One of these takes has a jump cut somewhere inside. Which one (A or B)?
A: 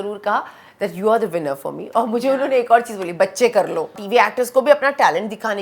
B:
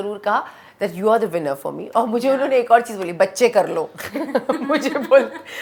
A